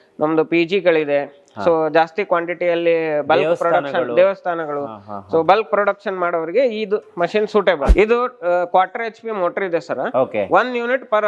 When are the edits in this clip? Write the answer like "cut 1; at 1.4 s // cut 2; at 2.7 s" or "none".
cut 1; at 7.9 s